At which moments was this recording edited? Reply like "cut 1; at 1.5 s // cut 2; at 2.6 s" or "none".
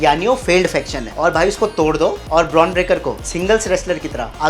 cut 1; at 1.0 s